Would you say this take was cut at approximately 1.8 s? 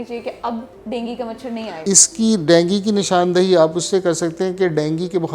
yes; 1 cut; at 1.8 s

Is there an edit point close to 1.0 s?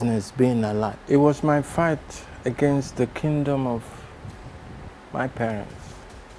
yes; 1 cut; at 1.0 s

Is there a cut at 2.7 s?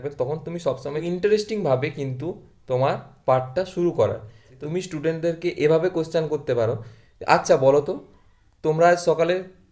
no; 2 cuts; at 1.0 s, 4.6 s

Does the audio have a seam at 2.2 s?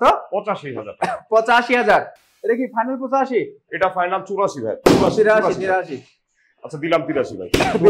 no; 0 cuts

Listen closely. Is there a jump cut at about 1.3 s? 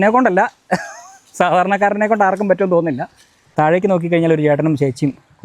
no; 1 cut; at 3.4 s

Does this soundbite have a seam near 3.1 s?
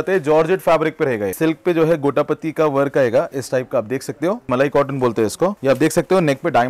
no; 3 cuts; at 1.4 s, 4.5 s, 5.6 s

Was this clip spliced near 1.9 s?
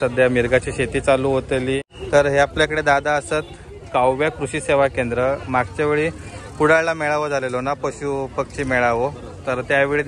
yes; 1 cut; at 1.9 s

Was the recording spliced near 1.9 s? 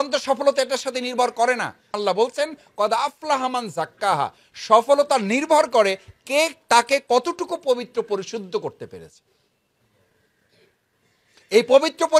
yes; 1 cut; at 1.9 s

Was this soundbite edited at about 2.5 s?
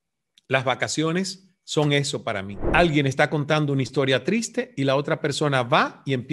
yes; 1 cut; at 2.5 s

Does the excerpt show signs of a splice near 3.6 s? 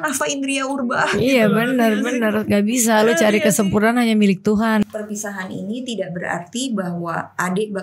no; 1 cut; at 4.8 s

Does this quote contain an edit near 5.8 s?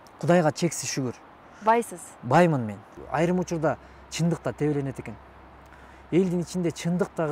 no; 1 cut; at 2.9 s

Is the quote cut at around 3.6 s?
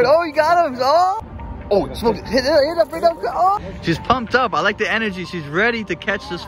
yes; 2 cuts; at 1.2 s, 3.6 s

